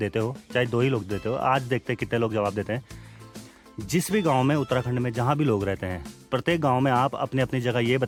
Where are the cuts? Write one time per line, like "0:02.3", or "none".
none

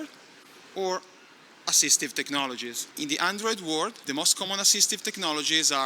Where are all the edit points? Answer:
0:02.8
0:04.0

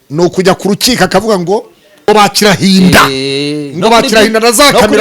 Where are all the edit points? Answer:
0:02.1

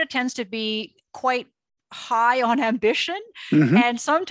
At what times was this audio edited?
0:01.0

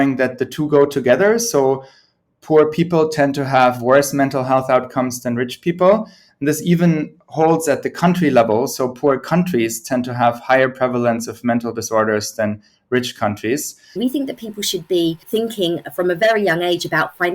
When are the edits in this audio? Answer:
0:14.0
0:15.2

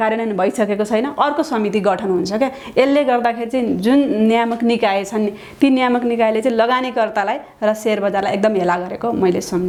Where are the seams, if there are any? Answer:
none

